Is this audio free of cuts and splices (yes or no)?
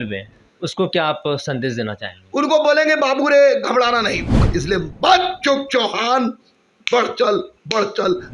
no